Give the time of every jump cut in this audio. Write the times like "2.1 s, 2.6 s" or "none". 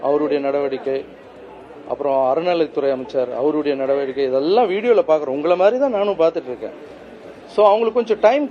none